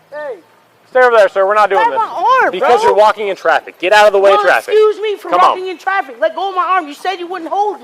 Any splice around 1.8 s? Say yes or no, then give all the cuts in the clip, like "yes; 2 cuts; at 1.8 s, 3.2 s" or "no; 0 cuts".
yes; 1 cut; at 1.8 s